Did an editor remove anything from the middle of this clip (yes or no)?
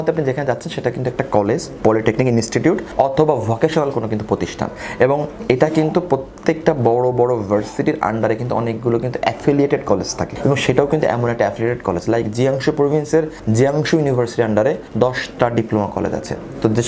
no